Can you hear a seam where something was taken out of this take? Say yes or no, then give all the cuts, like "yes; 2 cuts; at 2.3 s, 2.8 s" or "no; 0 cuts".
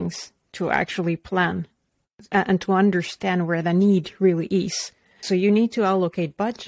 yes; 1 cut; at 5.2 s